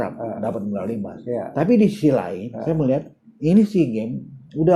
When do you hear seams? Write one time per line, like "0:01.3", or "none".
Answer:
none